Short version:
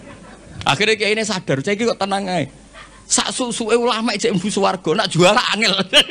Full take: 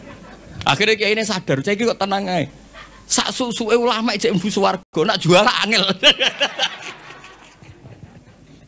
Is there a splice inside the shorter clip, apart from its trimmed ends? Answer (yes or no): yes